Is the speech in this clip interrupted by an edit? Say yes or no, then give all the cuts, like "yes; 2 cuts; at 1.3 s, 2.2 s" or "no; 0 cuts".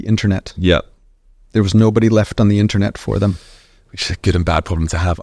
no; 0 cuts